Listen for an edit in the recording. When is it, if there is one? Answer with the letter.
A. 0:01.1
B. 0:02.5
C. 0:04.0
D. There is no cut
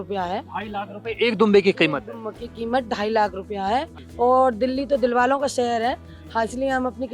C